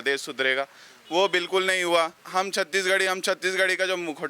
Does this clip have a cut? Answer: yes; 1 cut; at 2.2 s

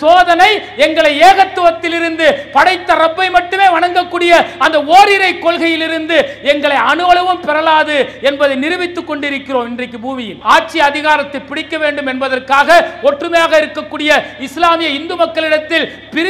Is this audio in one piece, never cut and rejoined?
no; 1 cut; at 10.3 s

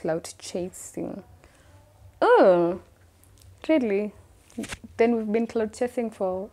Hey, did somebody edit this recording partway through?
no; 0 cuts

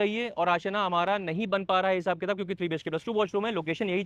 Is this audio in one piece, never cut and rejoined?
yes; 0 cuts

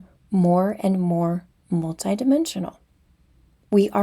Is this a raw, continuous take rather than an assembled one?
yes; 0 cuts

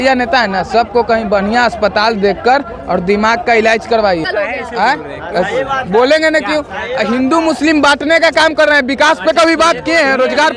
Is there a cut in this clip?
no; 0 cuts

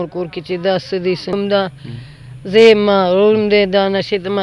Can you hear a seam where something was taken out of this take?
yes; 1 cut; at 1.3 s

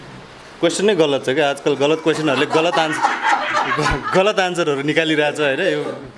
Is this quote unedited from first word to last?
yes; 0 cuts

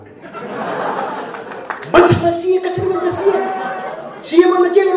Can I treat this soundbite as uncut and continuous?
no; 1 cut; at 1.9 s

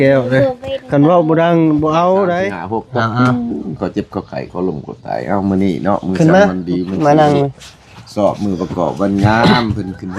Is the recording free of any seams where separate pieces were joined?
no; 1 cut; at 2.7 s

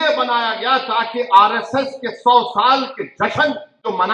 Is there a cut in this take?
no; 0 cuts

